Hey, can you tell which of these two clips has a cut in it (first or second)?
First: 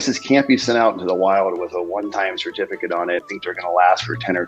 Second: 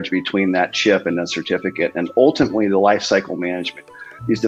first